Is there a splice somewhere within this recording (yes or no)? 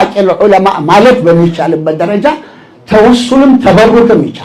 no